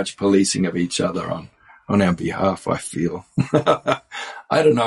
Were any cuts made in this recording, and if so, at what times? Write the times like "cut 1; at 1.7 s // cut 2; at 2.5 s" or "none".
none